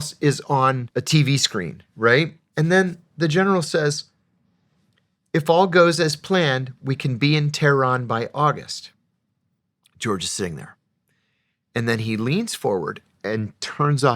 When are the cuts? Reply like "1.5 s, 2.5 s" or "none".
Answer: 0.8 s, 2.4 s